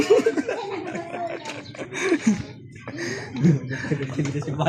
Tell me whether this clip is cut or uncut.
uncut